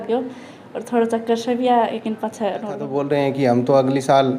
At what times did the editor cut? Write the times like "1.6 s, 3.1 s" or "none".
2.9 s

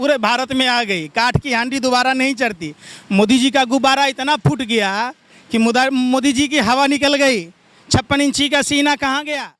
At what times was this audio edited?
none

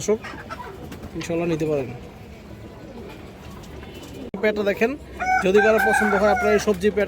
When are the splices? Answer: 4.4 s

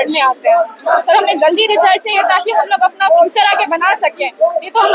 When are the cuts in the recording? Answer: none

